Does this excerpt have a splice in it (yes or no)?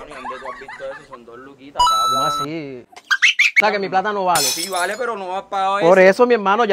yes